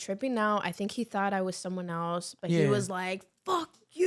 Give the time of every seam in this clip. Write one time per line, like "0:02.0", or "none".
none

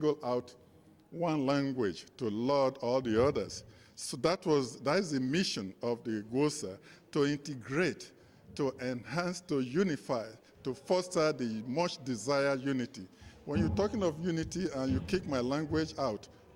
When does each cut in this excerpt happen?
none

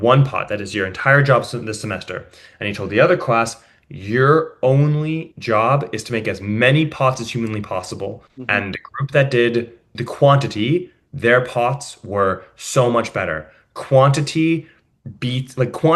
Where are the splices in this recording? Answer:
0:08.3
0:10.0

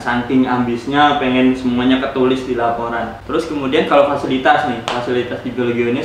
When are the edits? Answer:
0:03.2

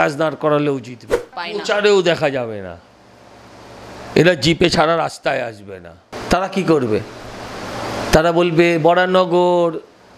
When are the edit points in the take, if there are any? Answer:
0:01.5
0:06.1

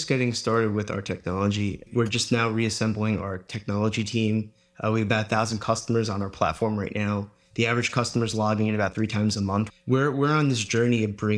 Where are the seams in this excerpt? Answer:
0:01.9
0:09.7

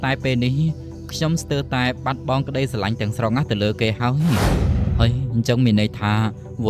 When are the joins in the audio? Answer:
0:04.5

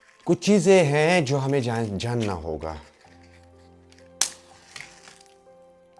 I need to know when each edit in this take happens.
none

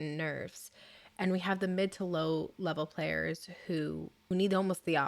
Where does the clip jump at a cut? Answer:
0:04.1

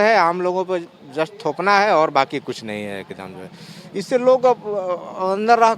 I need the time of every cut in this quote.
none

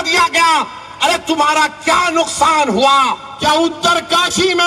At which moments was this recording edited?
0:03.3

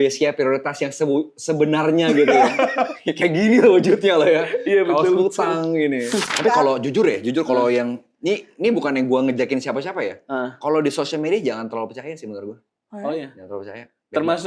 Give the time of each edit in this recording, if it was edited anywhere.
0:06.3

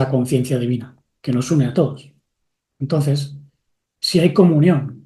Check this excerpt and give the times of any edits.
none

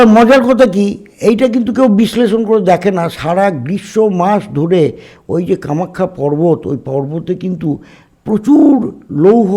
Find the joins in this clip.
none

